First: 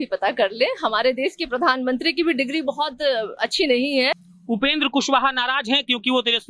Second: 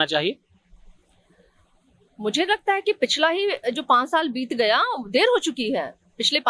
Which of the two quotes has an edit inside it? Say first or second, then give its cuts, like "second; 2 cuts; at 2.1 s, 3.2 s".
first; 1 cut; at 4.3 s